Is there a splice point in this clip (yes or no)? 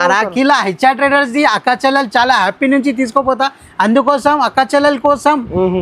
no